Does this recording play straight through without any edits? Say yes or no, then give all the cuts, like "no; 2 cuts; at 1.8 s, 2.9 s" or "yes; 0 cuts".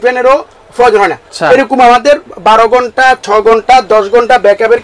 yes; 0 cuts